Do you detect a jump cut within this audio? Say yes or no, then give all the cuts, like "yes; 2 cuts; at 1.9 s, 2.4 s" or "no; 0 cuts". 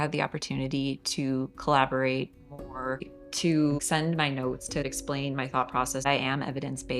yes; 3 cuts; at 3.2 s, 4.9 s, 6.0 s